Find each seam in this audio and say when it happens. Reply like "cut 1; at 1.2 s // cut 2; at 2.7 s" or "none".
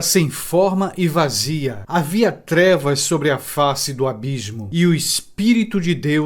cut 1; at 1.8 s // cut 2; at 4.5 s